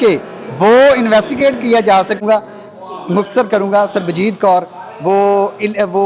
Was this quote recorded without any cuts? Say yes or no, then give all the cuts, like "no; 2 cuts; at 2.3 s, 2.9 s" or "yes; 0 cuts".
no; 1 cut; at 2.2 s